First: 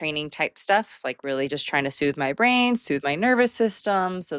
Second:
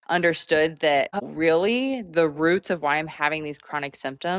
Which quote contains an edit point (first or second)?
second